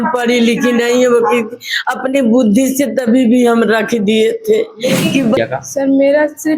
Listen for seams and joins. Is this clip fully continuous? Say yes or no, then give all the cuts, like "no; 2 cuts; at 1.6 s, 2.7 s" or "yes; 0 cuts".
no; 1 cut; at 5.4 s